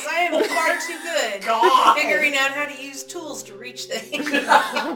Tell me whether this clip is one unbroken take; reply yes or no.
yes